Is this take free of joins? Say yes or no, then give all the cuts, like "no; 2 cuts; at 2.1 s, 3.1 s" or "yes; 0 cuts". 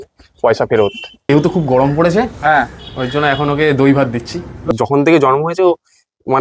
no; 2 cuts; at 1.3 s, 4.7 s